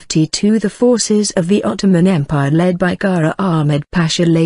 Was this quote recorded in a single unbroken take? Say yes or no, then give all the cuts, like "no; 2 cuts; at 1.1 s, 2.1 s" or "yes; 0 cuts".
yes; 0 cuts